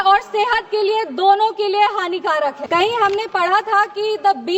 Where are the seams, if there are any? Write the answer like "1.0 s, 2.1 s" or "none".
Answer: 2.6 s